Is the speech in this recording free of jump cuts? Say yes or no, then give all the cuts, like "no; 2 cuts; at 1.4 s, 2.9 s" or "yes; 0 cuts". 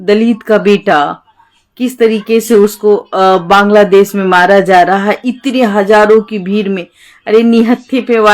yes; 0 cuts